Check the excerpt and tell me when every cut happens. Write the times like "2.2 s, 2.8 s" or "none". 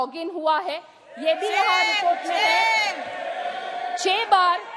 none

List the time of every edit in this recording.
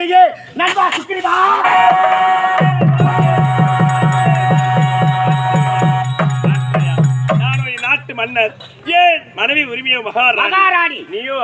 1.9 s

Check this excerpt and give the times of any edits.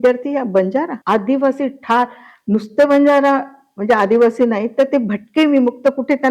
1.0 s

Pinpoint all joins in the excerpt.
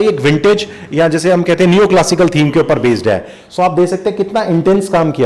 none

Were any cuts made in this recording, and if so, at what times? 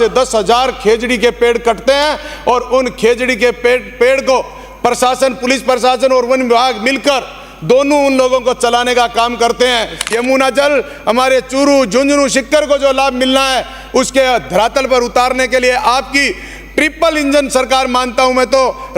10.1 s

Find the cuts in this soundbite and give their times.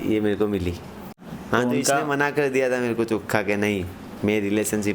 1.2 s

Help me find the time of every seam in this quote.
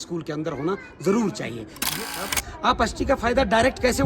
1.9 s

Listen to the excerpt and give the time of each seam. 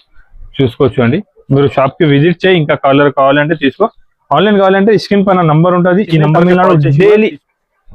6.4 s

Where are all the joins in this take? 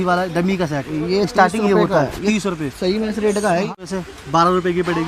3.7 s

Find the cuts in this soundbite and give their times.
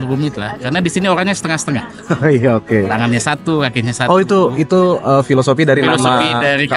none

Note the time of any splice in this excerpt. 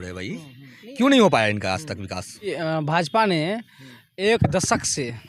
2.5 s

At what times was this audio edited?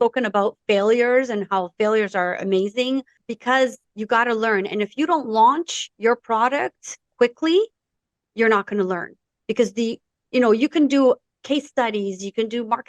3.2 s, 3.9 s

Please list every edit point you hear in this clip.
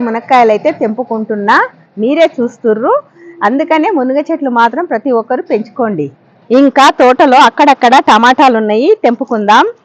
none

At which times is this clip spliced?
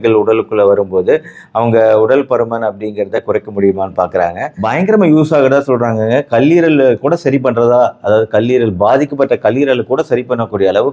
4.5 s

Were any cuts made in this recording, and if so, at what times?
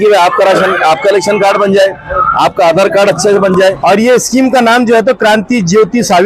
3.8 s

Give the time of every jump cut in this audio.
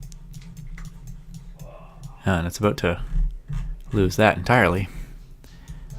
3.5 s

